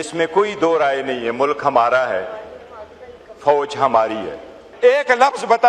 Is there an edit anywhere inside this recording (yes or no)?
yes